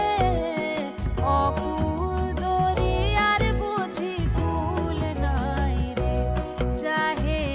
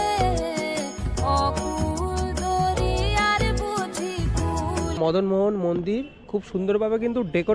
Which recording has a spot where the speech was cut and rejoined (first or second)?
second